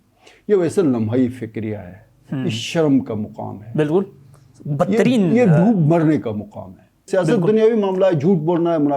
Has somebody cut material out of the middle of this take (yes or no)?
yes